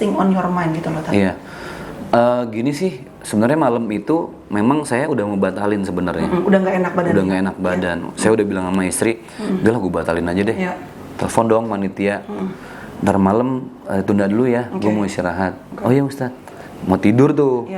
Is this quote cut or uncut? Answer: uncut